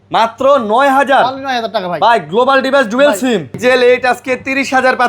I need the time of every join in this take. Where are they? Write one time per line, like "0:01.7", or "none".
0:03.6